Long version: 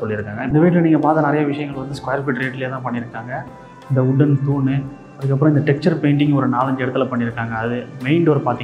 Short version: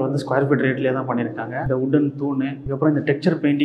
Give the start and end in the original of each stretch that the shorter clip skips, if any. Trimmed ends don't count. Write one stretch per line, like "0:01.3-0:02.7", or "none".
0:03.3-0:03.8
0:04.9-0:05.2